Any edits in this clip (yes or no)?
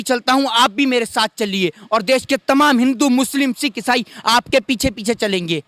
no